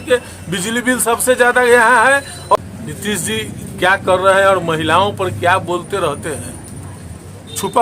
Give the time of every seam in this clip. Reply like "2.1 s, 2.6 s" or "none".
2.6 s